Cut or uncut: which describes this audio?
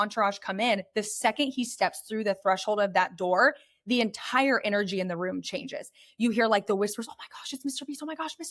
uncut